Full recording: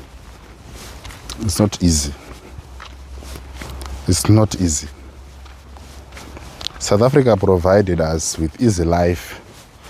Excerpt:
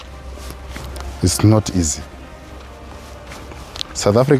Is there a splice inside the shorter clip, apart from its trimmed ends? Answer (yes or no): no